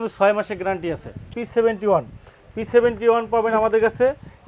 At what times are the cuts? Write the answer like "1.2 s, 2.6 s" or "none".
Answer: 1.3 s